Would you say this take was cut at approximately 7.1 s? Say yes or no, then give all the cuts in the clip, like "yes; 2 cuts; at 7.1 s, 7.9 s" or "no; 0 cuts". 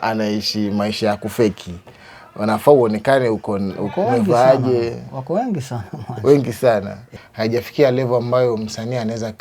yes; 1 cut; at 7.1 s